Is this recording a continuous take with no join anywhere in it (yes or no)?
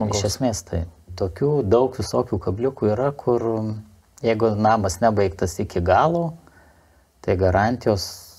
no